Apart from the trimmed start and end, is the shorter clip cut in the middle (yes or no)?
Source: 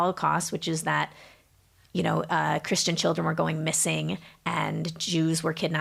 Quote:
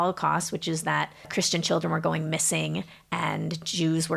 yes